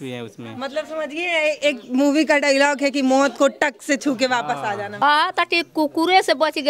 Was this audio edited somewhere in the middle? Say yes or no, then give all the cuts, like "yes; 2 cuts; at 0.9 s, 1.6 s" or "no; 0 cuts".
yes; 1 cut; at 4.9 s